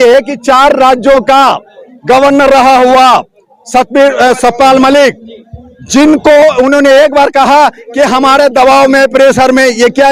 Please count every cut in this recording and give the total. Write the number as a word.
zero